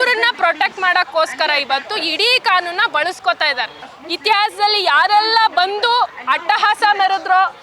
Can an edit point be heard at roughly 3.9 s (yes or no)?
yes